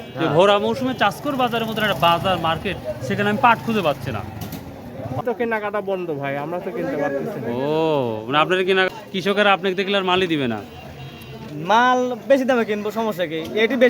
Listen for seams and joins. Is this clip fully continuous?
no; 2 cuts; at 5.2 s, 8.9 s

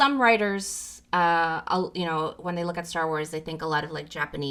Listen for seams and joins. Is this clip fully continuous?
yes; 0 cuts

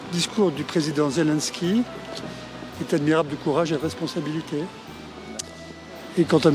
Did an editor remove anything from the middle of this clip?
no; 0 cuts

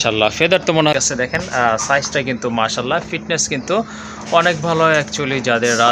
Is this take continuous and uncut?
no; 1 cut; at 0.9 s

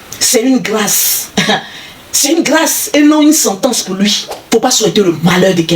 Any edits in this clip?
yes; 1 cut; at 4.3 s

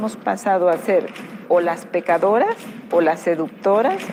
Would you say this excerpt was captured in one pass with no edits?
yes; 0 cuts

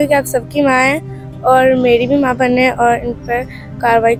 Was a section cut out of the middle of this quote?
no; 0 cuts

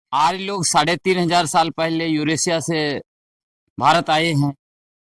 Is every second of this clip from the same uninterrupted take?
yes; 0 cuts

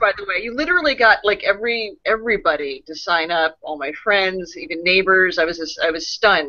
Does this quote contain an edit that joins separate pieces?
no; 0 cuts

